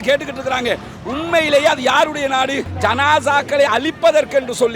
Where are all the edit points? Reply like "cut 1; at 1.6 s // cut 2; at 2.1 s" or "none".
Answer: cut 1; at 2.7 s